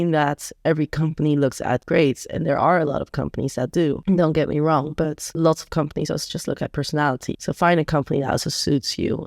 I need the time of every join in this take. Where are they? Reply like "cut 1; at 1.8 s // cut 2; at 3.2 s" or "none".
cut 1; at 7.3 s